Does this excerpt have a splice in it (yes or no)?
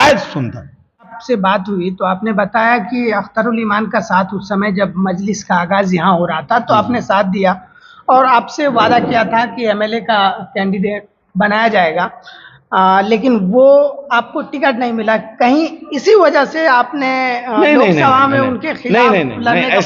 yes